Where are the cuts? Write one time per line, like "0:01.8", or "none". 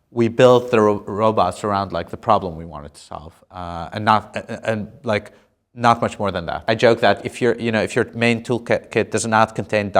0:06.6